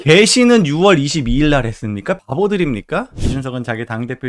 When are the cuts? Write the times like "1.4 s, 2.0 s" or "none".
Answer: 3.2 s